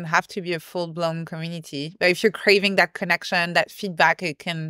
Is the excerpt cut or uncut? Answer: uncut